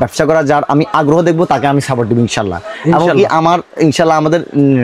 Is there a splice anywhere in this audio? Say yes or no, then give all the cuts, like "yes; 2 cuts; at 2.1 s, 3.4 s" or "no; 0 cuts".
no; 0 cuts